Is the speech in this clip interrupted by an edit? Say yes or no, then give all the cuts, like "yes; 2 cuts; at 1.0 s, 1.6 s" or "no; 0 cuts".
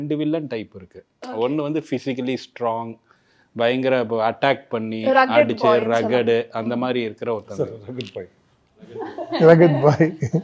no; 0 cuts